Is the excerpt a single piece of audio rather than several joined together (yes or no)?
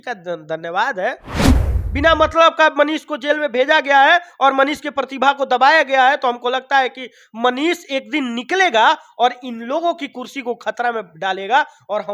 no